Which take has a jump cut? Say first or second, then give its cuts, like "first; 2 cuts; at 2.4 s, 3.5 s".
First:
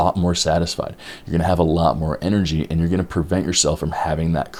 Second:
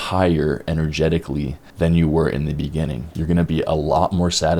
second; 2 cuts; at 1.6 s, 3.1 s